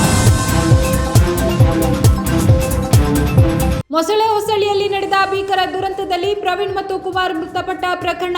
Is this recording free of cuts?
no; 1 cut; at 3.8 s

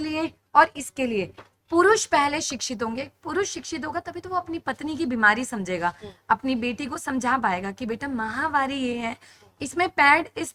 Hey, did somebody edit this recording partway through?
no; 0 cuts

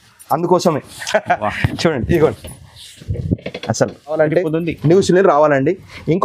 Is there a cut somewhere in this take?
yes; 1 cut; at 4.2 s

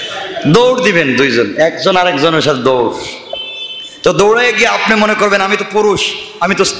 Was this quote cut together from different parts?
no; 0 cuts

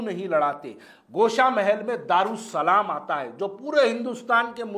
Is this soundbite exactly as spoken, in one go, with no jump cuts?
yes; 0 cuts

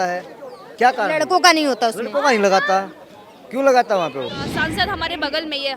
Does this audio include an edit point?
yes; 1 cut; at 4.4 s

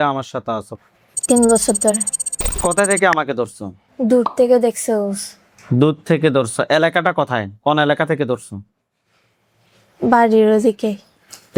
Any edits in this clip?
no; 0 cuts

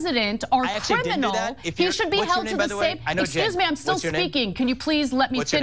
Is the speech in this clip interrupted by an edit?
no; 0 cuts

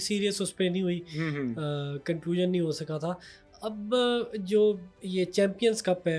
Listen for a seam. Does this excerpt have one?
no; 0 cuts

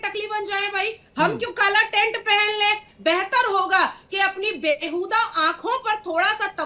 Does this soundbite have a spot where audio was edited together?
yes; 1 cut; at 2.9 s

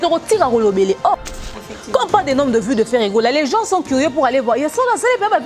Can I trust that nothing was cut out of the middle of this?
no; 1 cut; at 1.5 s

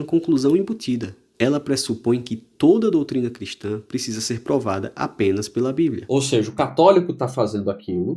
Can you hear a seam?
yes; 1 cut; at 6.0 s

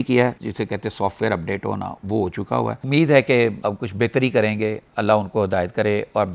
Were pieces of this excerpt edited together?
no; 0 cuts

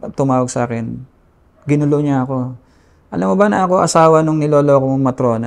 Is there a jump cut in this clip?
no; 0 cuts

